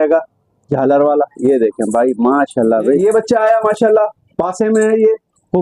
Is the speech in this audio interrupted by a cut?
yes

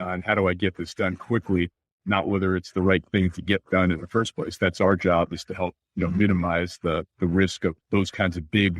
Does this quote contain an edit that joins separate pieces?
yes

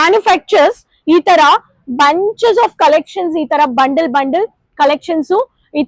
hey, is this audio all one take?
yes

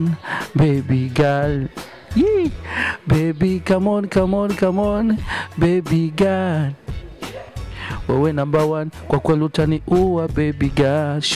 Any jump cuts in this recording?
no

